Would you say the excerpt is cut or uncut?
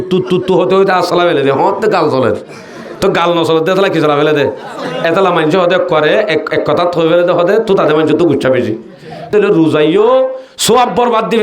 cut